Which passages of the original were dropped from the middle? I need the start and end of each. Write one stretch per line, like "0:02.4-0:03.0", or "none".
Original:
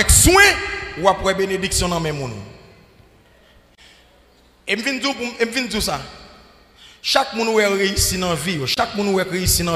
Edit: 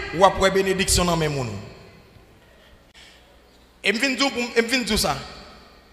none